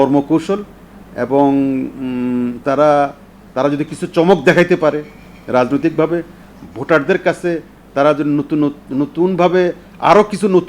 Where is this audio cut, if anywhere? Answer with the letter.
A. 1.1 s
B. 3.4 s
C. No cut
C